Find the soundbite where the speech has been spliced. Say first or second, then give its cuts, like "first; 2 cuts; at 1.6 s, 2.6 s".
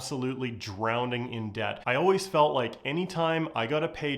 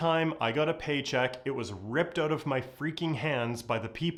first; 1 cut; at 1.8 s